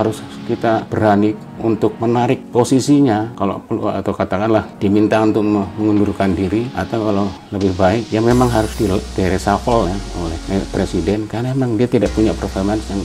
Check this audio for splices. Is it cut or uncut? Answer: cut